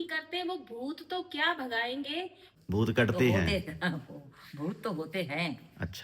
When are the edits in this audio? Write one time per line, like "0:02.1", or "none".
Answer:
0:02.4